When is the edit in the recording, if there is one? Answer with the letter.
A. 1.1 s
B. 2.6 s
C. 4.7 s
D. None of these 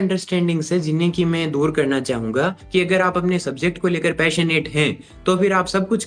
B